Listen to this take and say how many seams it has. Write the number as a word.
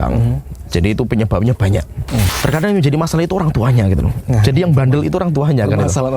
one